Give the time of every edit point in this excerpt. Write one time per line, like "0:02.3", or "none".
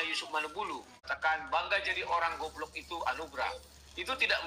0:01.1